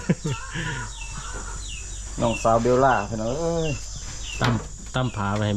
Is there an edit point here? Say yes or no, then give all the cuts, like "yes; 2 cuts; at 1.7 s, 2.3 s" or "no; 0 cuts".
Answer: no; 0 cuts